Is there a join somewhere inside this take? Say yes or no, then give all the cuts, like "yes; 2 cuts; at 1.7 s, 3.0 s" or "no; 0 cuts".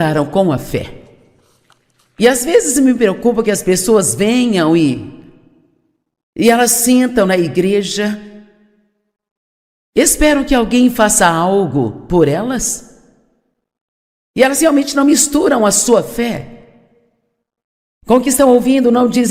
no; 0 cuts